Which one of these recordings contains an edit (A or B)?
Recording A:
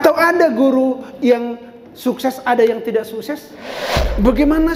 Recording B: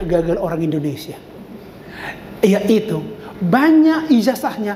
A